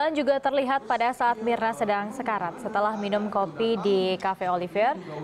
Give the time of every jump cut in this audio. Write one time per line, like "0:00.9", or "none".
none